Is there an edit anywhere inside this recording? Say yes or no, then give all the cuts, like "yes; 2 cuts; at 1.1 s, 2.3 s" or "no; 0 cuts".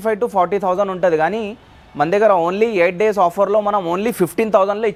no; 0 cuts